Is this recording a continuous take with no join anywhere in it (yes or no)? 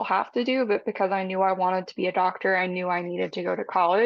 yes